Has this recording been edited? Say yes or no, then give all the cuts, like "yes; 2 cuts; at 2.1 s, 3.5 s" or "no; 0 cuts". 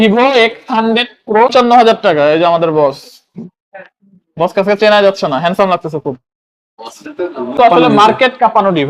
yes; 2 cuts; at 1.5 s, 7.6 s